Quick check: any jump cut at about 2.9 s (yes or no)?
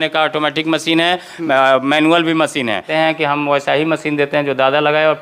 yes